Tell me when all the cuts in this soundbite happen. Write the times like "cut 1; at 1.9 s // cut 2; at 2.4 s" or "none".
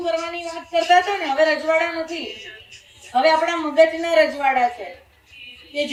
none

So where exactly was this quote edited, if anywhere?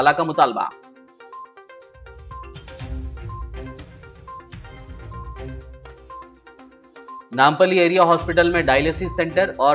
none

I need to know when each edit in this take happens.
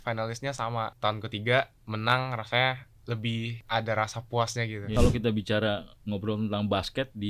cut 1; at 0.9 s // cut 2; at 3.6 s // cut 3; at 4.9 s

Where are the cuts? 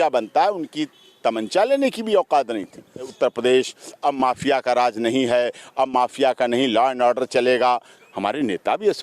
cut 1; at 3.1 s // cut 2; at 7.9 s

